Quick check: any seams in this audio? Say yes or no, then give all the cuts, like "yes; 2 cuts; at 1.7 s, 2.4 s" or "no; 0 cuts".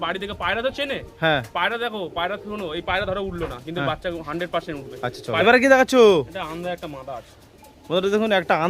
yes; 1 cut; at 5.4 s